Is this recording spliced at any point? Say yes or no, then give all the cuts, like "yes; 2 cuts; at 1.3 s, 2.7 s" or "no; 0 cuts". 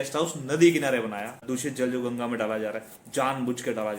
yes; 1 cut; at 1.4 s